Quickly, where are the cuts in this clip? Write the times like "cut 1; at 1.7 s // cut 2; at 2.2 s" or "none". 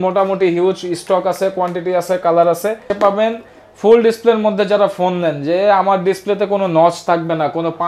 cut 1; at 2.9 s